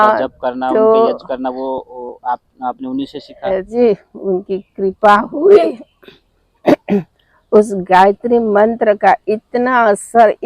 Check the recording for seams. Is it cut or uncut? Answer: cut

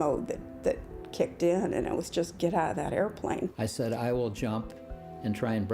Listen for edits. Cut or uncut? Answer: cut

